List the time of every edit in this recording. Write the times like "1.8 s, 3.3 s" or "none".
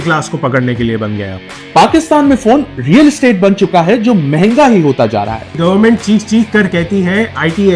1.3 s, 5.6 s